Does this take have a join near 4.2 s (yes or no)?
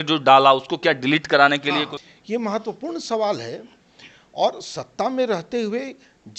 no